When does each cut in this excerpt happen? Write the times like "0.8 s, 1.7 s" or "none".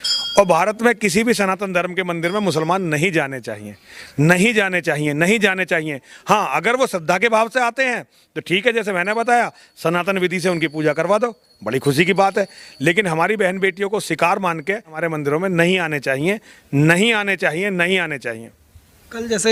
none